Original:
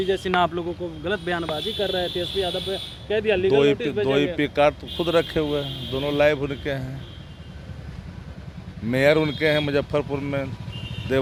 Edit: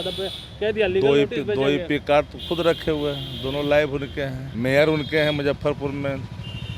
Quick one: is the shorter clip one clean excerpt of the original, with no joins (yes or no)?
no